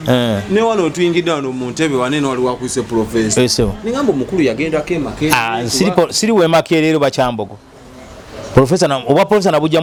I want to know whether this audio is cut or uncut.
uncut